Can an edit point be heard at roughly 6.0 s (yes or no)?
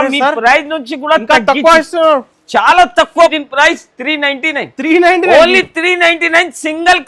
no